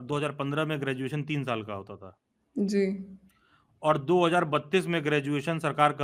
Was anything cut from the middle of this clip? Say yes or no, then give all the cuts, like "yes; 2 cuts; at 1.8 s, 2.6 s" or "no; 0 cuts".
no; 0 cuts